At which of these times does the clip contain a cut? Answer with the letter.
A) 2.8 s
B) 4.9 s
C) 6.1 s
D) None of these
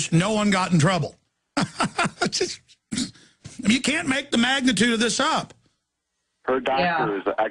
A